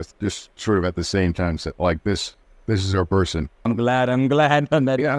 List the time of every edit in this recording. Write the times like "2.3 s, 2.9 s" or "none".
none